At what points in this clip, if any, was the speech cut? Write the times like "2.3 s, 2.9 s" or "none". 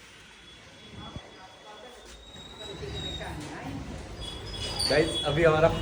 none